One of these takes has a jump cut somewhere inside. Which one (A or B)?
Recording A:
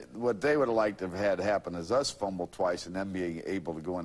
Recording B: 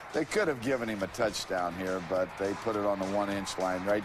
A